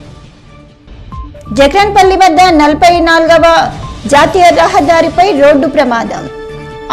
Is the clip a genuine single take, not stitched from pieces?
yes; 0 cuts

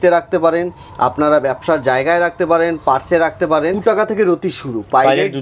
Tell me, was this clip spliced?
yes; 1 cut; at 3.8 s

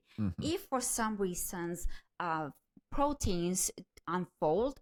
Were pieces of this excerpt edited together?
no; 0 cuts

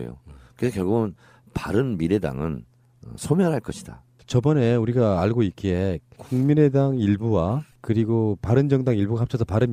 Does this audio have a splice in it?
no; 0 cuts

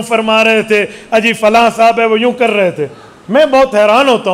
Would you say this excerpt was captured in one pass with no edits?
yes; 0 cuts

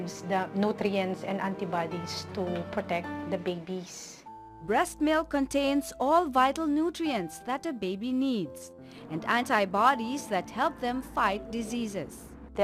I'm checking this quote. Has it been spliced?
no; 0 cuts

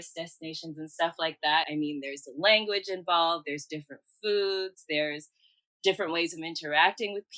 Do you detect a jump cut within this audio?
yes; 1 cut; at 1.7 s

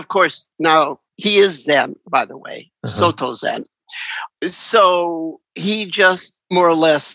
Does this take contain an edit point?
no; 0 cuts

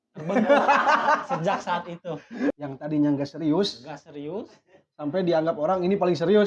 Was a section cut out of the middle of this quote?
yes; 1 cut; at 2.5 s

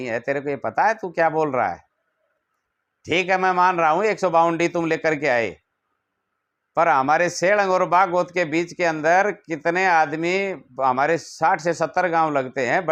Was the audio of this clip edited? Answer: no; 0 cuts

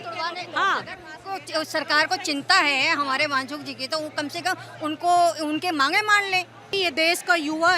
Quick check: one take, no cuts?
no; 1 cut; at 6.7 s

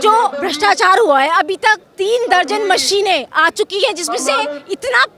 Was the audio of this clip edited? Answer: yes; 1 cut; at 1.9 s

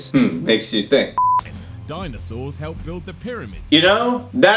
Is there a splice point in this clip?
yes; 1 cut; at 1.5 s

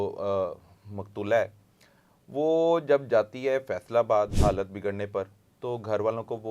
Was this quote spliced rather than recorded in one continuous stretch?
yes; 1 cut; at 4.3 s

